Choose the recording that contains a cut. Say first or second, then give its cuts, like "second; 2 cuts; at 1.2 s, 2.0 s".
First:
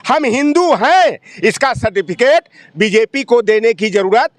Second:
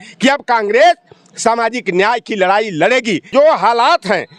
second; 1 cut; at 3.3 s